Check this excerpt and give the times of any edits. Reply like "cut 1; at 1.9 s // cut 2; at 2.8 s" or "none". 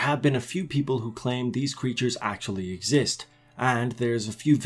cut 1; at 2.2 s